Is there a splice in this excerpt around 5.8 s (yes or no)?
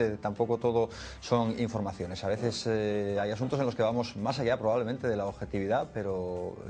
yes